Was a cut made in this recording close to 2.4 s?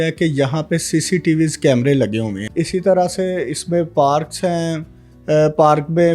yes; 1 cut; at 2.4 s

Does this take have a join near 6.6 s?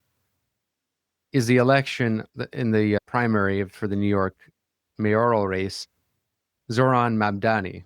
yes; 2 cuts; at 2.3 s, 6.6 s

